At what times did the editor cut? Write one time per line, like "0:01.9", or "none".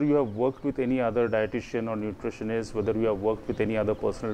none